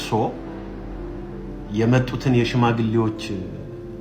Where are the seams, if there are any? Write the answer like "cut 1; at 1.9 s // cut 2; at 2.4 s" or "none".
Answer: none